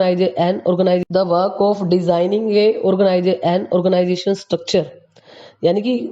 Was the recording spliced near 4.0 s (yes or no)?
yes